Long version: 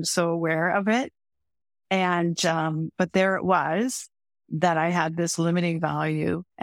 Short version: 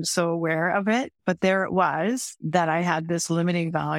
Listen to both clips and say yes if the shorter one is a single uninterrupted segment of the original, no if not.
no